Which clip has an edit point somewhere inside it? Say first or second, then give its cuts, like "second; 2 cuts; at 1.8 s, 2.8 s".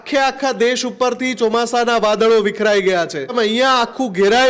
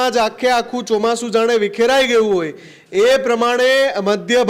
first; 1 cut; at 3.3 s